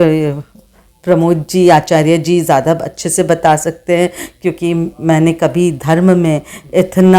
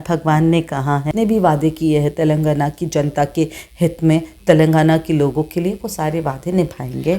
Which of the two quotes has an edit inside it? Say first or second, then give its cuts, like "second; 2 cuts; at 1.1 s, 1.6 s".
second; 1 cut; at 1.1 s